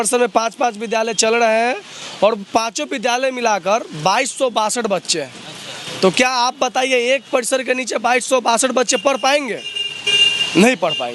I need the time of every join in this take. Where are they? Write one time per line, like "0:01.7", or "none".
none